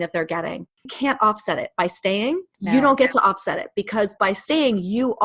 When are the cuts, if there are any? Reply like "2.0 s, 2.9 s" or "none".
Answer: 0.9 s, 2.5 s

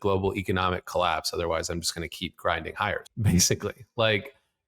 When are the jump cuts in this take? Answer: 3.0 s

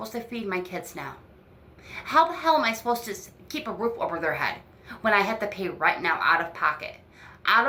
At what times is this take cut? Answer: none

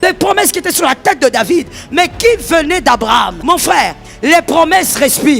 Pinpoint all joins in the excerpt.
3.3 s

